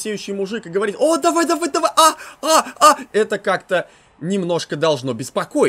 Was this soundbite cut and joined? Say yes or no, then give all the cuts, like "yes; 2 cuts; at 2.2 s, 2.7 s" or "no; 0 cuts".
no; 0 cuts